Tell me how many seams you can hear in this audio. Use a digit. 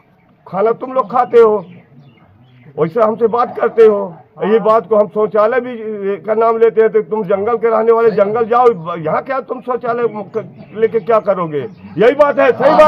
0